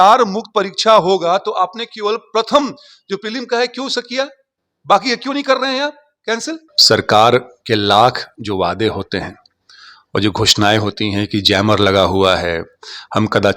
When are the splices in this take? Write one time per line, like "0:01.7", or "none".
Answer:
0:06.7